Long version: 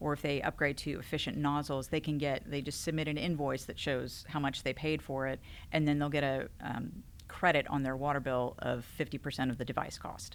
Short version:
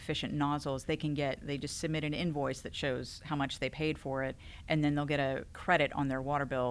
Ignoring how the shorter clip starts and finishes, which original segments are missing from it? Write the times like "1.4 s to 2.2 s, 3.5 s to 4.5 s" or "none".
6.5 s to 7.2 s